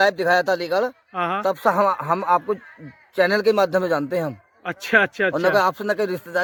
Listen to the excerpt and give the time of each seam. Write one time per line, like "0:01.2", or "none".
none